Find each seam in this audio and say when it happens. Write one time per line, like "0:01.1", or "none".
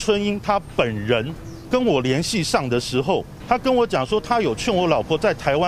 0:01.5
0:03.3